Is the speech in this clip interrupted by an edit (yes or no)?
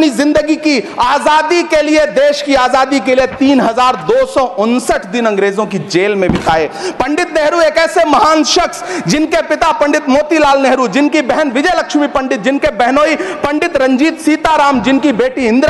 no